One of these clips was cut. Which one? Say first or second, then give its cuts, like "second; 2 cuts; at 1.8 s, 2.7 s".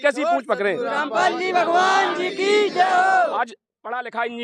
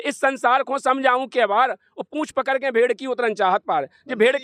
first; 1 cut; at 3.3 s